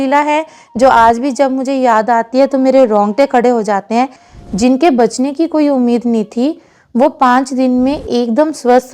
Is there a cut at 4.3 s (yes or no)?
yes